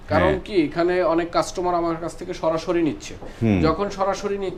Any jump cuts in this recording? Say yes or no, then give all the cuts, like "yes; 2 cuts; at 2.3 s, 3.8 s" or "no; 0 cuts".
no; 0 cuts